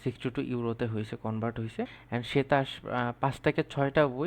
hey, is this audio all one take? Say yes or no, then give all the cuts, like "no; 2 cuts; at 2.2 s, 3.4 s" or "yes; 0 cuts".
no; 1 cut; at 2.0 s